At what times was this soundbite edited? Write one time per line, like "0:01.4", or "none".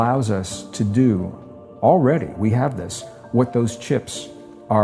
none